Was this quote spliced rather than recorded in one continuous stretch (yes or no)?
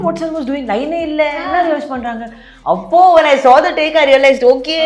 no